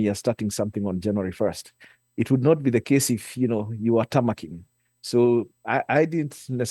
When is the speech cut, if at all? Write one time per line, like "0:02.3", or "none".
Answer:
none